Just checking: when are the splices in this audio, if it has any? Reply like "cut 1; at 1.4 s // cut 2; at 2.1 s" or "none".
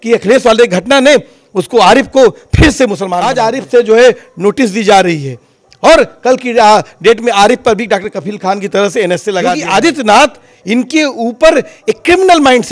cut 1; at 3.2 s // cut 2; at 9.6 s